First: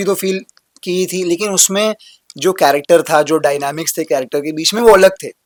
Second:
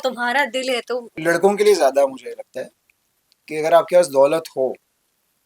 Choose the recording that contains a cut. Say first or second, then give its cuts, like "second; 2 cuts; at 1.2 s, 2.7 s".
second; 1 cut; at 1.1 s